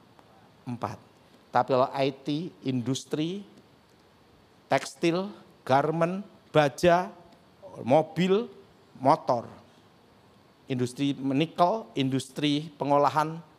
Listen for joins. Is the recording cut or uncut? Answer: uncut